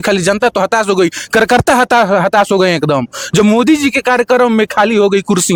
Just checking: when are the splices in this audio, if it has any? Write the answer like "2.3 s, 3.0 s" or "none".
none